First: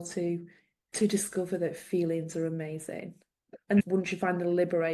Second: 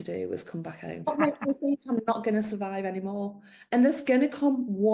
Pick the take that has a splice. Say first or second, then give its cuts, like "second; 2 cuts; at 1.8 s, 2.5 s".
second; 1 cut; at 1.0 s